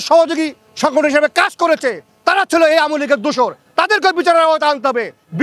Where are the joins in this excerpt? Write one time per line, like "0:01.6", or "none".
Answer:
none